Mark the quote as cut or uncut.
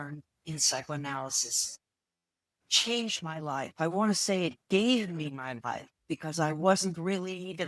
uncut